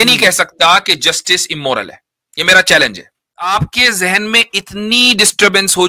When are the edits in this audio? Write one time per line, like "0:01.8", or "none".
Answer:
0:03.5